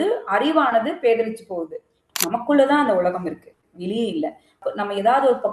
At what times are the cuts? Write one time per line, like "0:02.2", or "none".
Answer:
0:02.0